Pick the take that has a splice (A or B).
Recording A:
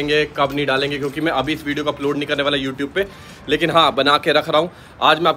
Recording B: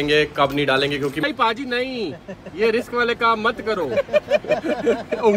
B